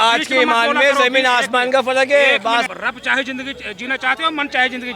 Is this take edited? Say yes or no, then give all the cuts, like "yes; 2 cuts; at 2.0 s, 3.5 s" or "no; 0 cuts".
yes; 1 cut; at 2.6 s